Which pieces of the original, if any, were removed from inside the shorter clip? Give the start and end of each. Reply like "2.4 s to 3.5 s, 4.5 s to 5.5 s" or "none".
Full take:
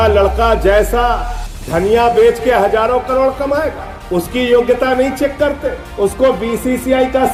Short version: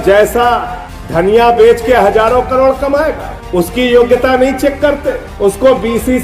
none